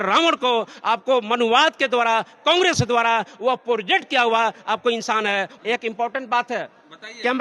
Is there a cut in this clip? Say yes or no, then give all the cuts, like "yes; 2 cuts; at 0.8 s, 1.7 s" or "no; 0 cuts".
yes; 1 cut; at 5.5 s